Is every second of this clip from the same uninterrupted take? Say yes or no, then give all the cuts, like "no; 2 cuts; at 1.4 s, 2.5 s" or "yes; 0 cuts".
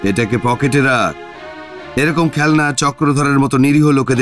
yes; 0 cuts